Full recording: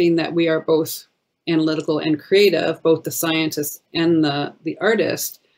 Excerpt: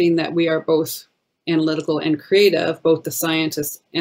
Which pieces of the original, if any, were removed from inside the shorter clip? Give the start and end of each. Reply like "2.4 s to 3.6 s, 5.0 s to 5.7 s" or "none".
none